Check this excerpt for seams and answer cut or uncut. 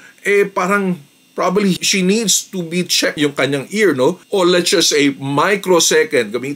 cut